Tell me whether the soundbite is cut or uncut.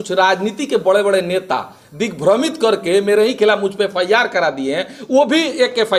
uncut